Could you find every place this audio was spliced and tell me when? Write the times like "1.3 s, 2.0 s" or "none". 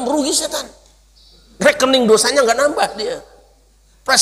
none